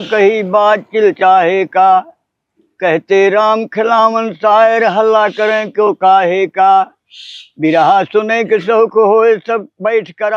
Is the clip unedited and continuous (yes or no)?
yes